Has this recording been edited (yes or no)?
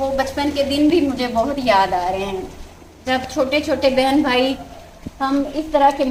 no